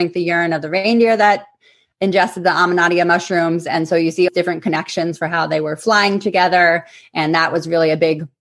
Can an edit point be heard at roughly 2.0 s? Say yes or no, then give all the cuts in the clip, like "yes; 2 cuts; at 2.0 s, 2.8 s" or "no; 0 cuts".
no; 1 cut; at 4.3 s